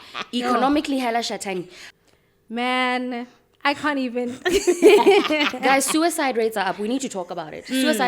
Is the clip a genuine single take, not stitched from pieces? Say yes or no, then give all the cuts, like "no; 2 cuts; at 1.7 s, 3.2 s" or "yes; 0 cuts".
no; 1 cut; at 1.8 s